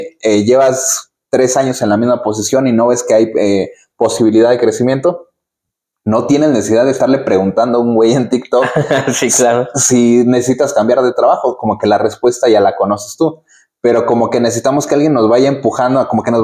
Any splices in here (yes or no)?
no